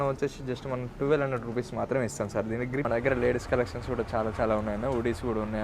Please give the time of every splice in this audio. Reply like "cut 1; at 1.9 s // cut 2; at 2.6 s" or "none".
cut 1; at 2.9 s